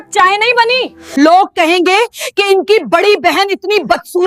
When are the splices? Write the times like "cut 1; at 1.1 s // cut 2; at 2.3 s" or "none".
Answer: cut 1; at 1.0 s